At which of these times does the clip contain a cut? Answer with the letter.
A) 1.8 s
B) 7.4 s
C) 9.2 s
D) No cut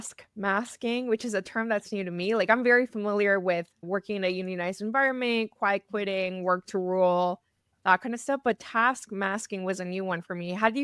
D